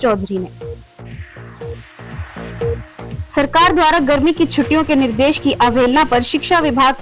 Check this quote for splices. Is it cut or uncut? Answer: cut